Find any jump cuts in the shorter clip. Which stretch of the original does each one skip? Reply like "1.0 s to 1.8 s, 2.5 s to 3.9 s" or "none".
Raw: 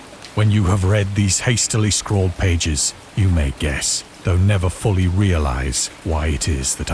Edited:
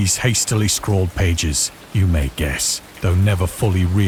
none